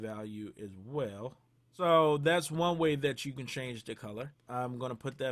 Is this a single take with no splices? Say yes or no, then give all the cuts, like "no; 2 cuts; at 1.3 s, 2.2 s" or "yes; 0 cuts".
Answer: no; 2 cuts; at 1.6 s, 4.4 s